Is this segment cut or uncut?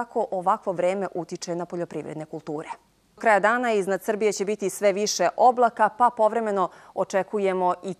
cut